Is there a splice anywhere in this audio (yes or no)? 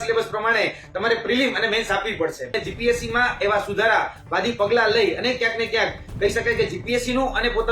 yes